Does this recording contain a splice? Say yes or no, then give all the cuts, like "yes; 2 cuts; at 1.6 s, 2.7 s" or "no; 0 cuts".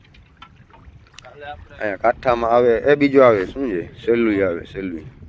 no; 0 cuts